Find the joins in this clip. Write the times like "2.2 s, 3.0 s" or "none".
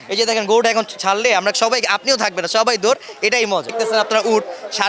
3.7 s